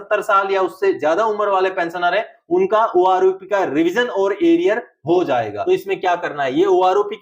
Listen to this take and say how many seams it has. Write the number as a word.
one